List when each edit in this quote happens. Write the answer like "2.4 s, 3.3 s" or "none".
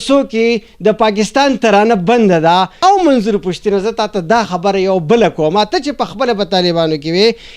2.8 s